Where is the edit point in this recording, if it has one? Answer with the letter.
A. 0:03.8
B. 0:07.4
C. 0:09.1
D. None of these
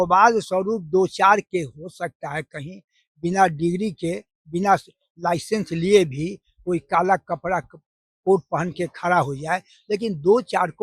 D